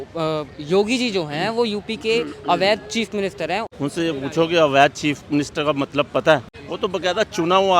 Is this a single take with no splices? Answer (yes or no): no